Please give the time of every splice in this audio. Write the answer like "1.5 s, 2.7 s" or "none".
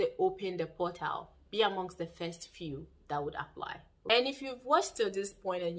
3.9 s